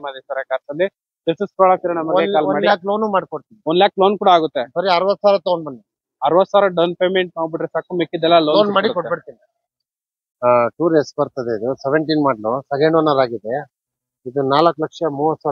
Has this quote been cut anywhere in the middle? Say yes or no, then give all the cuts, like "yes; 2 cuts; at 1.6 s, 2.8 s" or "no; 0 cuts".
yes; 1 cut; at 10.3 s